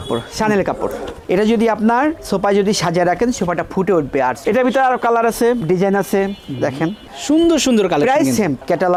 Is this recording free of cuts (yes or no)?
yes